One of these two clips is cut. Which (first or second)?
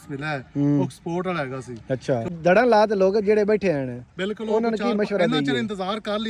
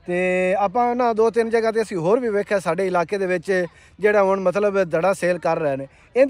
first